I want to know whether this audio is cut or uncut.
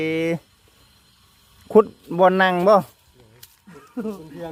uncut